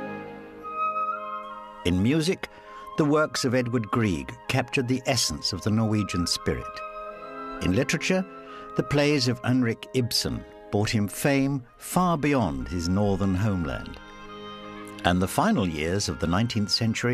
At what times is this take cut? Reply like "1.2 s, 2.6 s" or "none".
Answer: 8.3 s